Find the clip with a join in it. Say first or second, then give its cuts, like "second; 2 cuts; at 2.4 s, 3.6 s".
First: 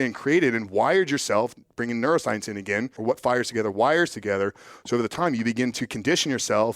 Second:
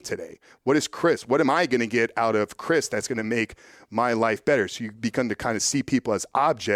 first; 1 cut; at 3.0 s